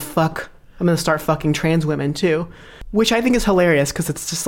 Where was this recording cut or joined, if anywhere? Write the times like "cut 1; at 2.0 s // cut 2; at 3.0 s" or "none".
cut 1; at 2.7 s